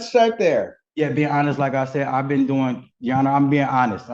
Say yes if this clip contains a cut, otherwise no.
no